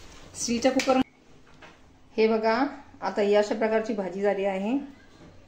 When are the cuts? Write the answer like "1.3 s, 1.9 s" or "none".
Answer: 1.0 s

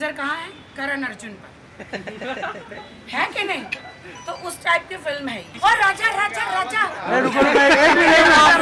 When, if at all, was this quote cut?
5.5 s

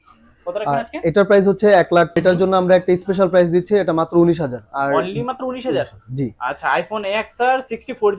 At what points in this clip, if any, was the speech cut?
2.2 s

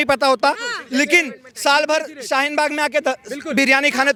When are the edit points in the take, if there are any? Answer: none

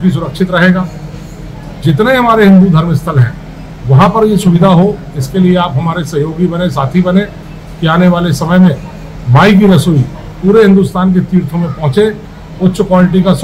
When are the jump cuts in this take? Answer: none

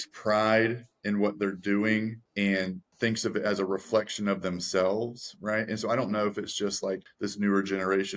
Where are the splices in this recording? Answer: 2.7 s, 7.1 s

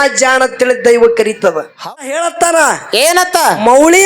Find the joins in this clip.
1.8 s

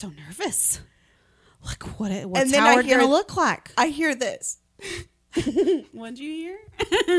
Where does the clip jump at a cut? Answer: none

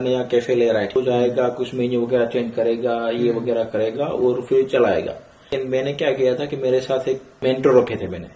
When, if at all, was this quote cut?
0.9 s, 5.5 s, 7.3 s

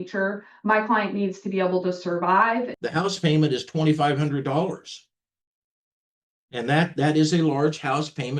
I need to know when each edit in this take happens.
2.7 s

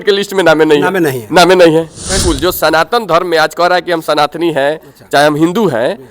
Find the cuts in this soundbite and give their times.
2.2 s

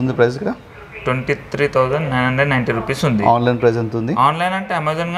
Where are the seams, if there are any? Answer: none

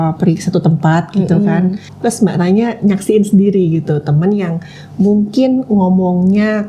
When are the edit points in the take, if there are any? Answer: 1.9 s

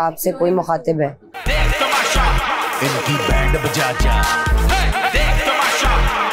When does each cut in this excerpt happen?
1.3 s

